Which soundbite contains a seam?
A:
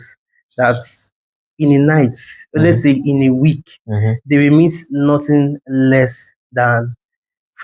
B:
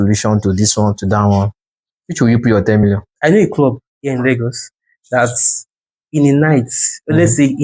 B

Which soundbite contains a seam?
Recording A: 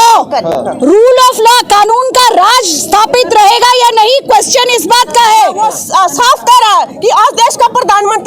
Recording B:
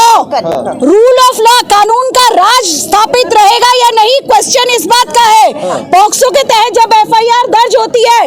A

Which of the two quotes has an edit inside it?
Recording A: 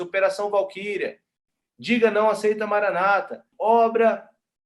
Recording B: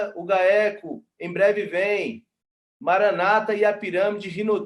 A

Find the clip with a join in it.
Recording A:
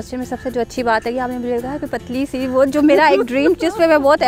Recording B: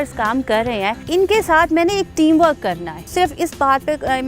B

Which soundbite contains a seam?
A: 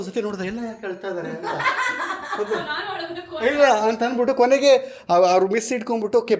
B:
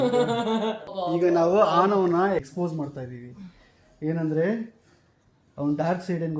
B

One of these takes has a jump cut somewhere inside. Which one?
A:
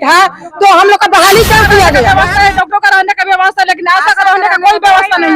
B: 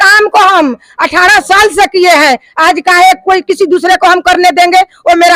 A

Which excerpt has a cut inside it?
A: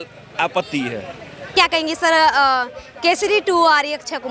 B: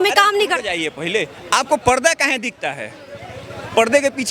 A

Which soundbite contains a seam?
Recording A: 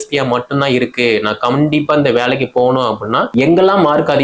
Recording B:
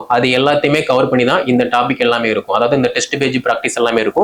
A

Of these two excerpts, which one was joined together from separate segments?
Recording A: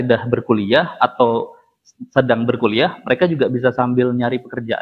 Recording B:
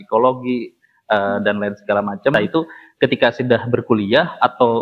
B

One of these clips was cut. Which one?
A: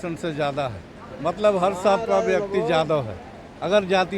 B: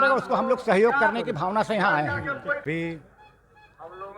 B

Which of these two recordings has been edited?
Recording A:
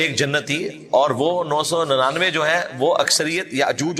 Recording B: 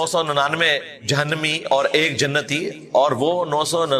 B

